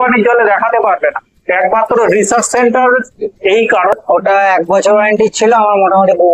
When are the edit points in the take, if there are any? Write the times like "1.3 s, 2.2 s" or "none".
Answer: 3.9 s